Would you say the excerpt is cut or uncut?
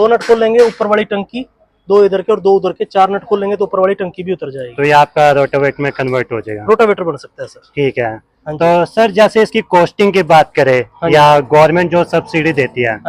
uncut